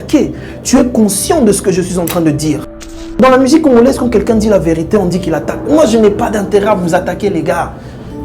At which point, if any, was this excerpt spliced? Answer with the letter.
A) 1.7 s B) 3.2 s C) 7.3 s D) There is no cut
B